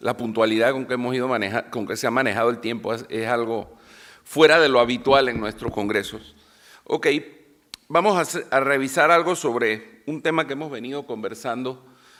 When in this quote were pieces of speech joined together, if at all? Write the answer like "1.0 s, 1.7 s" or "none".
none